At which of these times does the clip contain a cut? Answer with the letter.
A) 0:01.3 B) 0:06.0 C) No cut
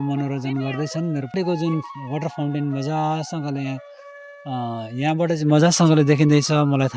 A